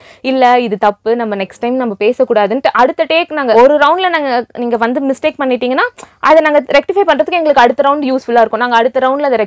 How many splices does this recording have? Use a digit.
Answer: 1